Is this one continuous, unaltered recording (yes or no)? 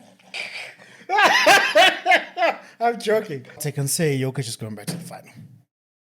no